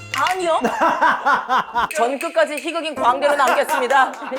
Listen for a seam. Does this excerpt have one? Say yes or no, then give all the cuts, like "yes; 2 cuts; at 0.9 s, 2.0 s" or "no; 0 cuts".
yes; 1 cut; at 1.9 s